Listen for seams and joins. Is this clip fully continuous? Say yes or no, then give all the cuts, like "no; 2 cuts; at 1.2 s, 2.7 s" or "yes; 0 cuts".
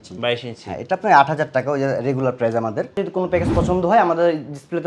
no; 1 cut; at 3.0 s